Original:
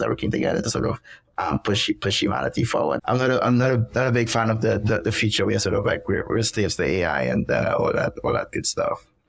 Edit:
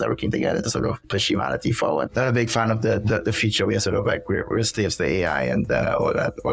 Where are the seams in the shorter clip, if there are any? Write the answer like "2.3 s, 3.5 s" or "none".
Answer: 1.1 s, 2.1 s